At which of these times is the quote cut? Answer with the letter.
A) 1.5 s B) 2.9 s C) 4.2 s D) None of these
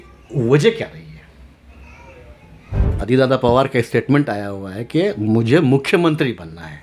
B